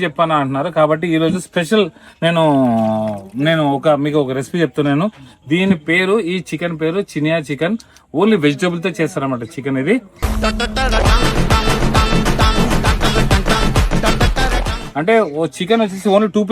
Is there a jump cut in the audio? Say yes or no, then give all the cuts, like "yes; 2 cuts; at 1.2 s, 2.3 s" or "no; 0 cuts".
no; 0 cuts